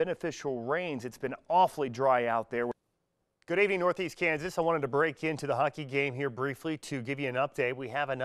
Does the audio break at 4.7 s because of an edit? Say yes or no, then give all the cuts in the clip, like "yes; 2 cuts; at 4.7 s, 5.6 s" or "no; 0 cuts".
no; 1 cut; at 2.7 s